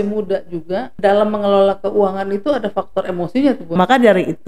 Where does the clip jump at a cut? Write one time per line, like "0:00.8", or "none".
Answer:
0:00.9
0:03.8